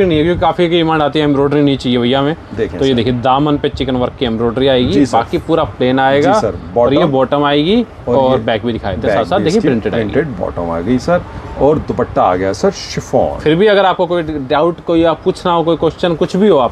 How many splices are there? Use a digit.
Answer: 0